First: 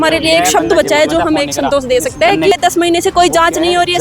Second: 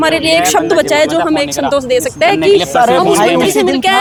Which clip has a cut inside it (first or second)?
first